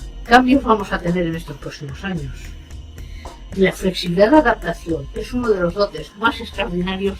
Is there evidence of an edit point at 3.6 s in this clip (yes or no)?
yes